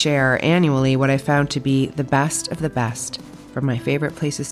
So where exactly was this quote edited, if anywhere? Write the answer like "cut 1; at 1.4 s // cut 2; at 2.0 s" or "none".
none